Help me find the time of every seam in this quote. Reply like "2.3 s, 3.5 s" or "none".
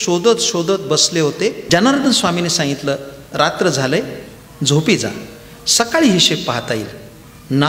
1.6 s